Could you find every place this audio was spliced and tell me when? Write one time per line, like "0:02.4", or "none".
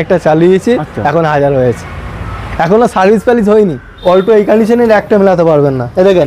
0:03.9